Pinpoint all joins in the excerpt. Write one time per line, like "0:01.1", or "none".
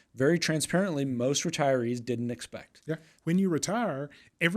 0:03.1